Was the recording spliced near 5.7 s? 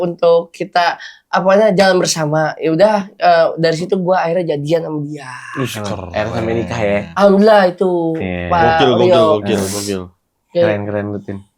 no; 0 cuts

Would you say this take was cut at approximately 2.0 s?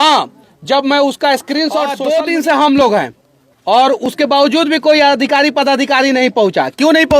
yes; 1 cut; at 2.0 s

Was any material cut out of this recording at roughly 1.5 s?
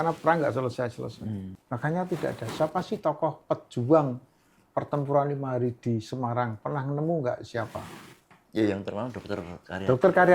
yes; 1 cut; at 1.5 s

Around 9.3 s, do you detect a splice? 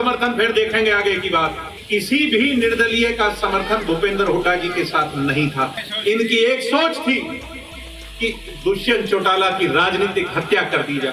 no; 2 cuts; at 1.7 s, 5.8 s

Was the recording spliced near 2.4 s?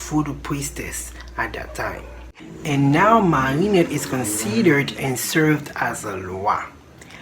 yes; 1 cut; at 2.4 s

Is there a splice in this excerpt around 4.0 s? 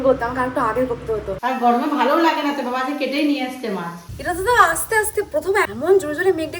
yes; 2 cuts; at 1.4 s, 4.0 s

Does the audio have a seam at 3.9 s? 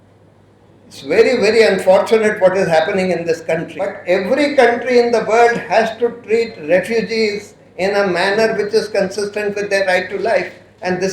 yes; 1 cut; at 3.9 s

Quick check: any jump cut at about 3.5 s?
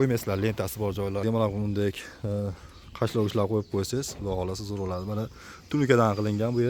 no; 1 cut; at 1.2 s

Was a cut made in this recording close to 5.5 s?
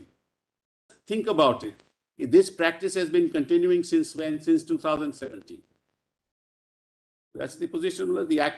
no; 1 cut; at 1.0 s

